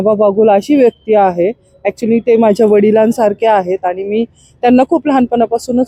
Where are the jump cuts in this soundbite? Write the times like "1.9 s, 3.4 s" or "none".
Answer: none